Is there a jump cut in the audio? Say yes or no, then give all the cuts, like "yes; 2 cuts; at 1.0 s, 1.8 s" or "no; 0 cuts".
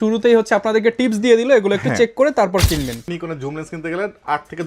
yes; 1 cut; at 3.1 s